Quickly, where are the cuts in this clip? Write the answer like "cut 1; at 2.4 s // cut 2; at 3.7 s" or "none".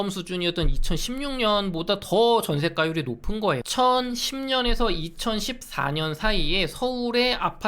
cut 1; at 3.7 s